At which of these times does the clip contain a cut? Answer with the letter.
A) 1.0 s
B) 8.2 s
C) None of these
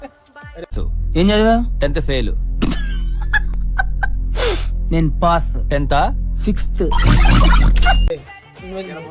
C